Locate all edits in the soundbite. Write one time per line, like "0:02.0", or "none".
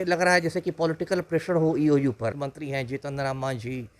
0:02.5